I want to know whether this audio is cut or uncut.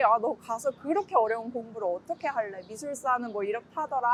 uncut